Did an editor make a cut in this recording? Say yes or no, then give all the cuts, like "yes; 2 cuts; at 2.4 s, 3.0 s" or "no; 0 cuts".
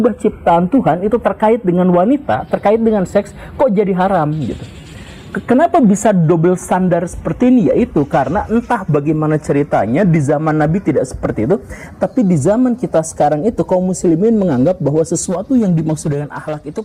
no; 0 cuts